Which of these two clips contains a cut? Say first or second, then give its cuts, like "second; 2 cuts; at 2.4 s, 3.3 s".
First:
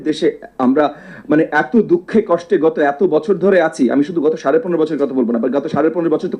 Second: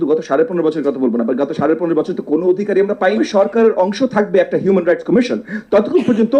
second; 1 cut; at 3.2 s